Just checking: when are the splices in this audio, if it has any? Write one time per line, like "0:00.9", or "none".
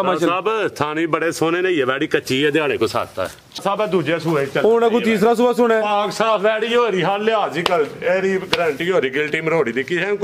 0:03.6